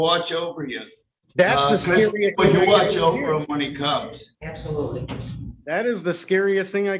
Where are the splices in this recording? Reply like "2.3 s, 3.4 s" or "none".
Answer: none